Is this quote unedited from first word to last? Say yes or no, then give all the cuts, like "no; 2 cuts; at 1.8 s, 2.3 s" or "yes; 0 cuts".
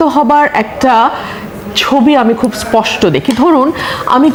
yes; 0 cuts